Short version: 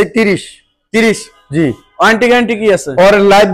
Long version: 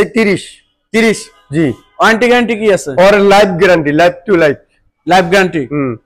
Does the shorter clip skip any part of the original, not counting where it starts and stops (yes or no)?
no